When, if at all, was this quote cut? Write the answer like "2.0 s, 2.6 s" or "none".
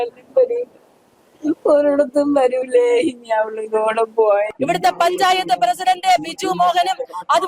4.5 s